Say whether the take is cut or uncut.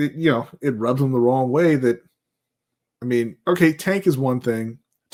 uncut